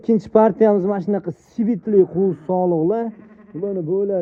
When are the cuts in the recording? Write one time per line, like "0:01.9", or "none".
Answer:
none